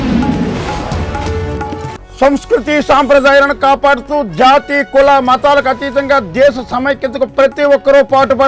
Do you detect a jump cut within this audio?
yes; 1 cut; at 2.0 s

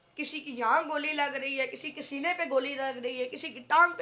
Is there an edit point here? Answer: no; 0 cuts

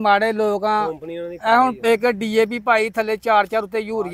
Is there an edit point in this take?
no; 0 cuts

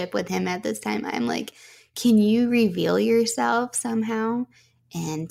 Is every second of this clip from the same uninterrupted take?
yes; 0 cuts

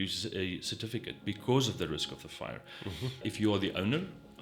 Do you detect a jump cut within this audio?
yes; 1 cut; at 3.3 s

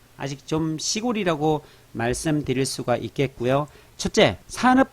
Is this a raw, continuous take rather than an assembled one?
no; 1 cut; at 3.9 s

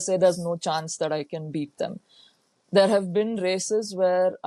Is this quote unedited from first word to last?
yes; 0 cuts

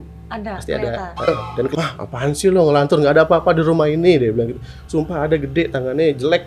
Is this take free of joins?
no; 1 cut; at 1.3 s

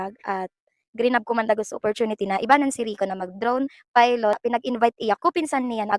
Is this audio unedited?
no; 1 cut; at 4.4 s

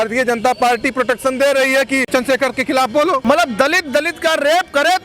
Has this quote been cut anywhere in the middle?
yes; 2 cuts; at 2.1 s, 3.2 s

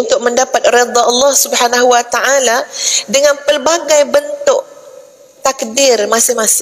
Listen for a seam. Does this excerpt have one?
no; 0 cuts

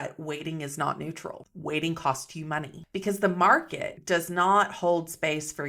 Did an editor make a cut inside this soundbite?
yes; 2 cuts; at 1.5 s, 2.8 s

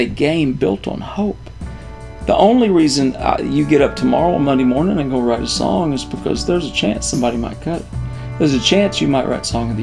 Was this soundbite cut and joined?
no; 0 cuts

